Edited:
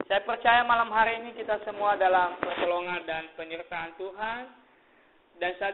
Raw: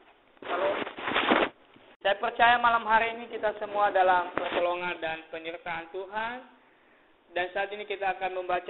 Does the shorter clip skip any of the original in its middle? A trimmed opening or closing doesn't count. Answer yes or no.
no